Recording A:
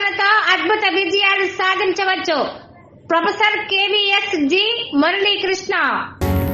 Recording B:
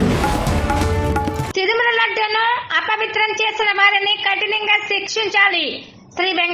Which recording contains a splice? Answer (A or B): B